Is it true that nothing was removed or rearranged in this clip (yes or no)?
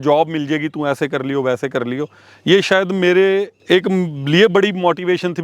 yes